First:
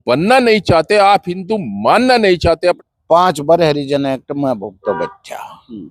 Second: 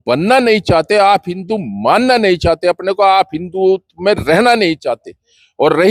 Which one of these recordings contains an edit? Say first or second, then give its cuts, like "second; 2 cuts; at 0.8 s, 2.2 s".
first; 1 cut; at 2.8 s